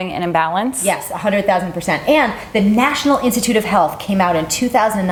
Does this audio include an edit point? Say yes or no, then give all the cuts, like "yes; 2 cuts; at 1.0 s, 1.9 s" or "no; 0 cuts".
no; 0 cuts